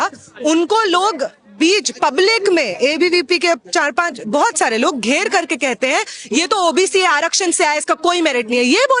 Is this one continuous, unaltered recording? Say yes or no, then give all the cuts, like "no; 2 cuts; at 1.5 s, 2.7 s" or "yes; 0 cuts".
yes; 0 cuts